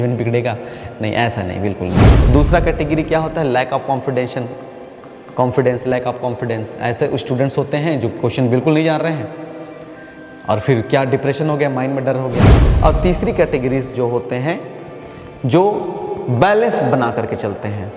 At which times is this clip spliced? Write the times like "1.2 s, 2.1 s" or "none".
2.0 s, 12.6 s